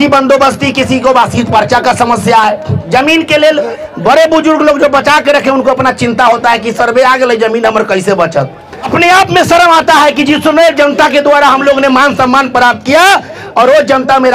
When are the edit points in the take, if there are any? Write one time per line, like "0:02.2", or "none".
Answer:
0:02.7
0:08.9